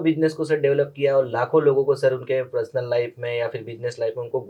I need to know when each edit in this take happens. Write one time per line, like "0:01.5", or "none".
none